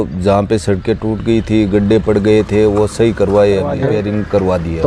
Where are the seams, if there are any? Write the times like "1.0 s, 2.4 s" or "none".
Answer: 3.8 s